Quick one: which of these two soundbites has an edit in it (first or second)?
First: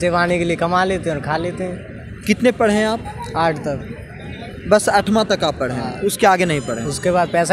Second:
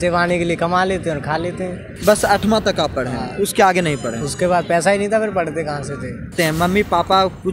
second